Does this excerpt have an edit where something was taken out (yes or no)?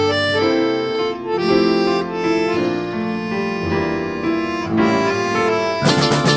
no